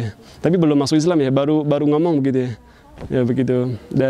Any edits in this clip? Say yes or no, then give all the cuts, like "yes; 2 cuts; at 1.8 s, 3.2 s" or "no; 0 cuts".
no; 0 cuts